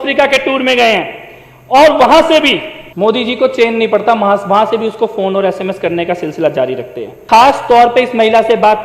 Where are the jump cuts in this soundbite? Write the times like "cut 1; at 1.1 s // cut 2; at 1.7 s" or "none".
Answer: cut 1; at 2.8 s // cut 2; at 7.1 s